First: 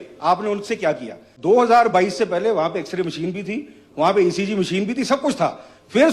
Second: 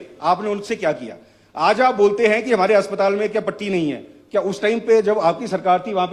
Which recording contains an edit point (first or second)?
first